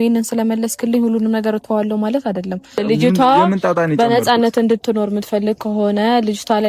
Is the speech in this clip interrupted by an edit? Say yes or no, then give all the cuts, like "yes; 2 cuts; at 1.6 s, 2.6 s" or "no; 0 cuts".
yes; 1 cut; at 2.8 s